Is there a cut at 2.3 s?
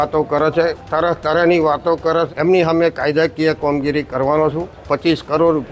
yes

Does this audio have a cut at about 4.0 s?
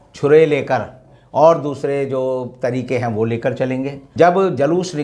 yes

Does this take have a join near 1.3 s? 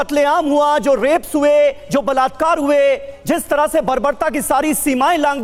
no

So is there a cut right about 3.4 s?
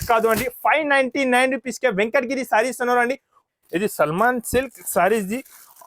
yes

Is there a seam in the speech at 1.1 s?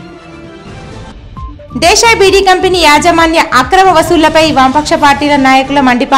yes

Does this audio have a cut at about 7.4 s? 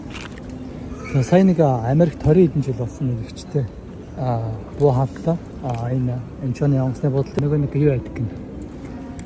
yes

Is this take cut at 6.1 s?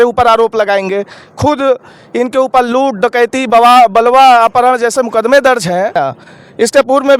yes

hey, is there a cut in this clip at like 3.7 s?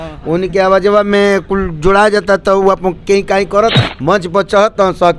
yes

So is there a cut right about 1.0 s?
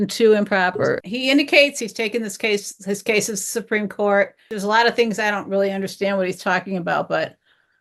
yes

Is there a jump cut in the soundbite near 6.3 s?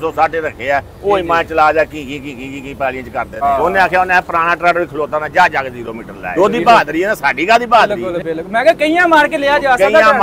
yes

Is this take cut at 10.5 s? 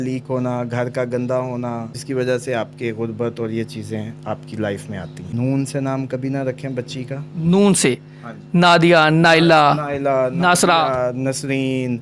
no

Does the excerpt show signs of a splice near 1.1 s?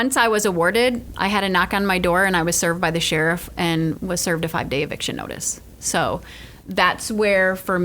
yes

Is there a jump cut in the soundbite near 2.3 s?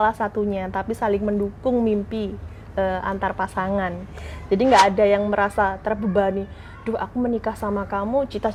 no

